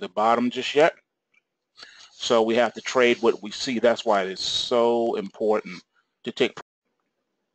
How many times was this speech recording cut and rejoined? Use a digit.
0